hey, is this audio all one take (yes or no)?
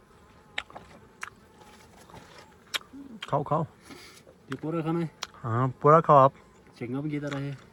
yes